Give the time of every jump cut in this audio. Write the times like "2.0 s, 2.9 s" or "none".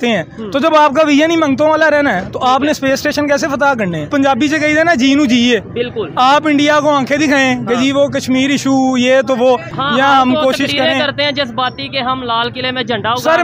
4.1 s, 9.7 s